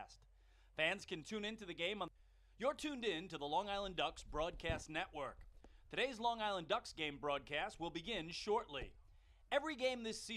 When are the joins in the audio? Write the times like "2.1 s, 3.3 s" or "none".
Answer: 2.1 s